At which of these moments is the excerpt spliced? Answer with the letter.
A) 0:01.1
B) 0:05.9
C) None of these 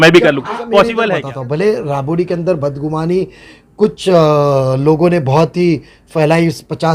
A